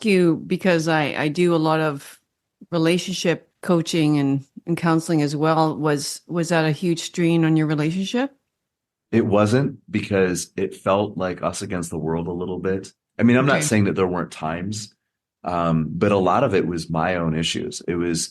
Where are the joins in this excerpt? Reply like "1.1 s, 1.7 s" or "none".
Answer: 3.5 s